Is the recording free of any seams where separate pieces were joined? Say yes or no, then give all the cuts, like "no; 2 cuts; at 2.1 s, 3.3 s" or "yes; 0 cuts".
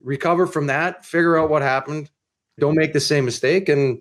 no; 1 cut; at 2.6 s